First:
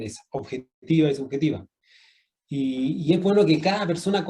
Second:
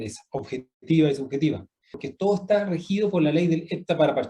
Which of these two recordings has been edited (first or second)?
second